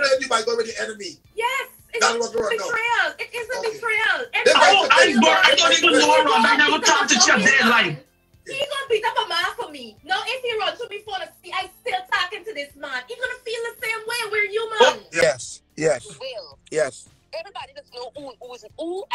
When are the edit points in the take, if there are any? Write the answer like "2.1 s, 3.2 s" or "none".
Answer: 15.2 s